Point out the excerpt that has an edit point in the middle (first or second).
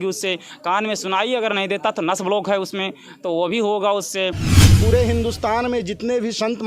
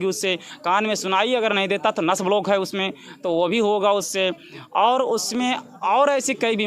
first